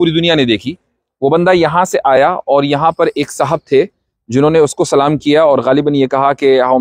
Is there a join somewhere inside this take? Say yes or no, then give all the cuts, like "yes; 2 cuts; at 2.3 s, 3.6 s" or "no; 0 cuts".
no; 0 cuts